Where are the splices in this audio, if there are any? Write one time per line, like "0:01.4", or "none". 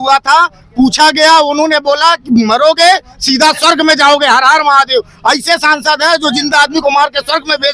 none